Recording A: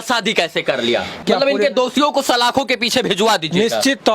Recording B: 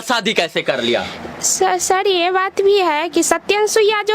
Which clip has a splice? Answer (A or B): A